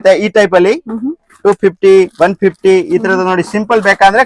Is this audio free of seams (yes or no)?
yes